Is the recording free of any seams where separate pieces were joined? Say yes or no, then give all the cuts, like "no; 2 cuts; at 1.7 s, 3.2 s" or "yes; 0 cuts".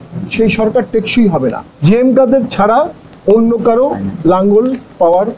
no; 1 cut; at 1.6 s